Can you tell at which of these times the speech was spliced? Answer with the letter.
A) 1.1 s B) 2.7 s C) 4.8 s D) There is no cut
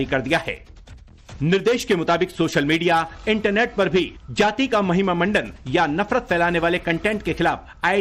C